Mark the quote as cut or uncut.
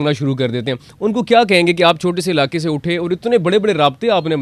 uncut